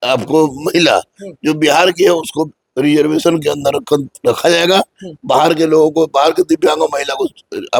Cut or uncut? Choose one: uncut